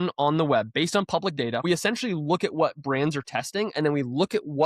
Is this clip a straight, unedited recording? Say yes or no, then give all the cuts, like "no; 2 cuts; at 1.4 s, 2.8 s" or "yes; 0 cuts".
no; 1 cut; at 1.6 s